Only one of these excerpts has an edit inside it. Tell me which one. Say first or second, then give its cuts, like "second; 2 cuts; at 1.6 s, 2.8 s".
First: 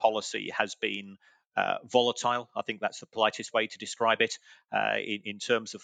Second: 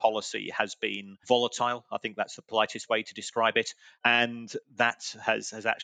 second; 2 cuts; at 1.2 s, 3.8 s